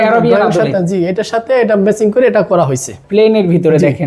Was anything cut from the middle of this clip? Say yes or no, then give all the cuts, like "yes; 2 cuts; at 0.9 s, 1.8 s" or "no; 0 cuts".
yes; 1 cut; at 3.0 s